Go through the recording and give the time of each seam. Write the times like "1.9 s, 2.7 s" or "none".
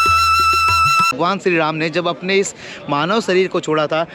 1.1 s